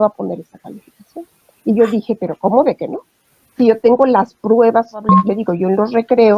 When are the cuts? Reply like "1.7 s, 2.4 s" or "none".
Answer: 1.4 s, 5.2 s